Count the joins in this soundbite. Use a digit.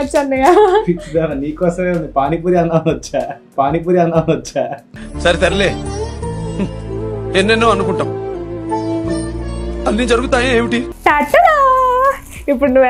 1